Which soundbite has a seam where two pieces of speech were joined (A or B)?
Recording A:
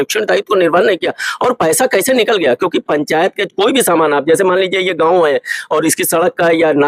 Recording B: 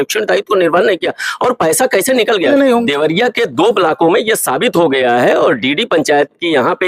B